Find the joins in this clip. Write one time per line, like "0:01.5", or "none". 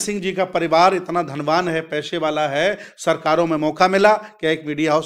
none